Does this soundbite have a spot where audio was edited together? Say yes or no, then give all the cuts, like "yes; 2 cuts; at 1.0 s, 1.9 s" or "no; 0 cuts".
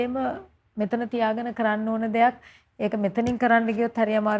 no; 0 cuts